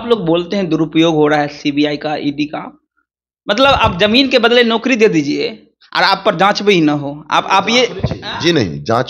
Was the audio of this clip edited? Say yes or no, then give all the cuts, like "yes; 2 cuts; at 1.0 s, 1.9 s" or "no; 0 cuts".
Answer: no; 0 cuts